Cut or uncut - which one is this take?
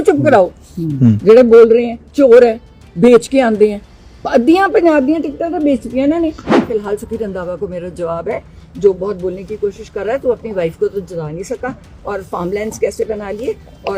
cut